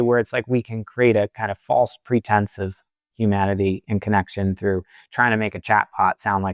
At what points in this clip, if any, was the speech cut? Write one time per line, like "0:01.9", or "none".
none